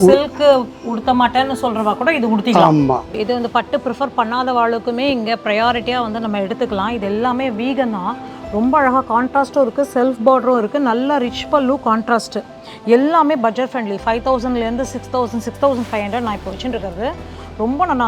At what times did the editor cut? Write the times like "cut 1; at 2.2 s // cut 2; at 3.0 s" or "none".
cut 1; at 3.2 s